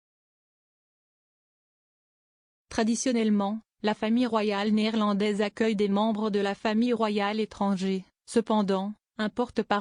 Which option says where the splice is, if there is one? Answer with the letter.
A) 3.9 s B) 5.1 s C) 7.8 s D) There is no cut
C